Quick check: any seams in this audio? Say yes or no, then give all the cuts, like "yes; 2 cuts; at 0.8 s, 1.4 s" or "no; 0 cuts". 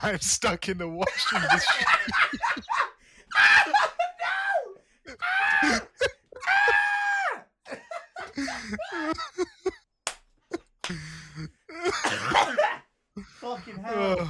no; 0 cuts